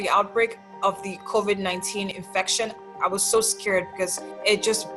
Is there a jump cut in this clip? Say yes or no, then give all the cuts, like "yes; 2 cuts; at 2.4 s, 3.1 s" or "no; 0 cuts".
no; 0 cuts